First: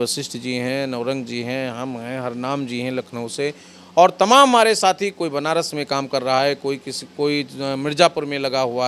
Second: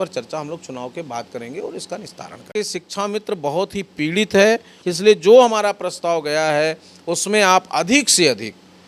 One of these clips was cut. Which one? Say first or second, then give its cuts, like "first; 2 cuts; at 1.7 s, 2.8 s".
second; 2 cuts; at 2.5 s, 4.8 s